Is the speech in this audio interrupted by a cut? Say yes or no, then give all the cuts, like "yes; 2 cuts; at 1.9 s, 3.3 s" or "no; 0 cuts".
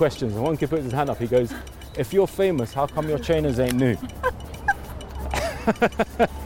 no; 0 cuts